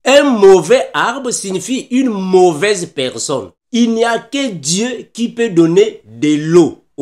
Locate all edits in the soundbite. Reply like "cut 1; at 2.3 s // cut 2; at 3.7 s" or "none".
cut 1; at 3.6 s